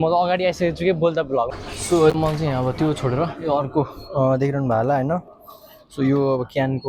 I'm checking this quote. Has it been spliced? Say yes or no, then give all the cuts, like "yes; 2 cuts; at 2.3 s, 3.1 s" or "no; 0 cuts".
yes; 1 cut; at 1.5 s